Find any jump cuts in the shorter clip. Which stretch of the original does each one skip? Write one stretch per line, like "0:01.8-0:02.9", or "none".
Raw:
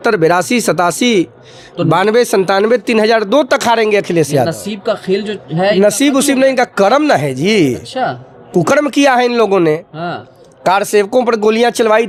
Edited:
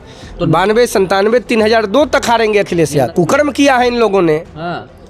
0:04.5-0:08.5